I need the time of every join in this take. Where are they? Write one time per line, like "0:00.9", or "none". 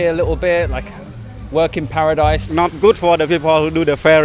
0:02.4

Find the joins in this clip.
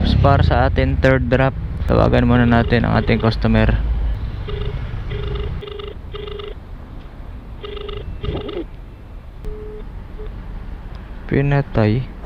0:01.7
0:04.2
0:05.6

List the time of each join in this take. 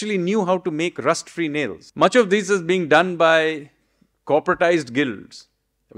0:01.8

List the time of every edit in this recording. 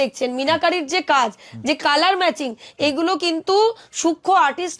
none

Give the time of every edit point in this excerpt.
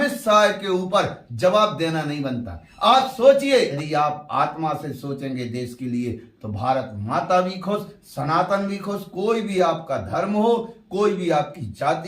0:03.8

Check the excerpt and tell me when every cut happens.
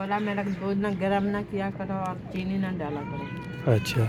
none

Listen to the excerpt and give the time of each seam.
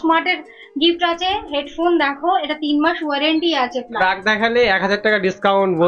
0:04.0

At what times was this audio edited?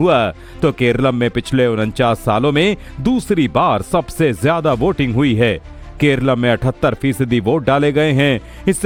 none

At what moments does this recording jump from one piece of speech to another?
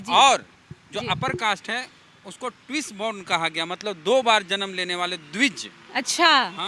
none

